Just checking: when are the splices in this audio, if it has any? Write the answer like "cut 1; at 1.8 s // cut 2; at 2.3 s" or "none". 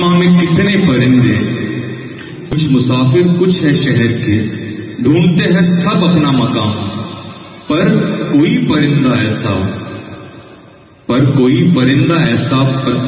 cut 1; at 2.5 s

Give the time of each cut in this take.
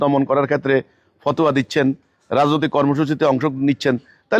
none

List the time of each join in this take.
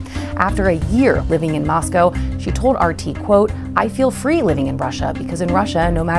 none

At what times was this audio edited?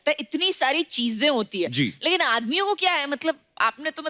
none

